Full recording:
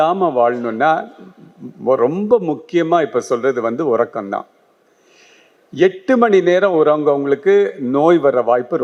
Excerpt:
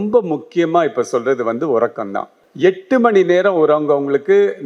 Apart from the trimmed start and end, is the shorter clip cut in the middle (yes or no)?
yes